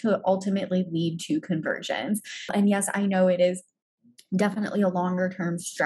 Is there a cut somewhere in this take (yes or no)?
yes